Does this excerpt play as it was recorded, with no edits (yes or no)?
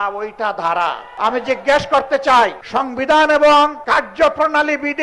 no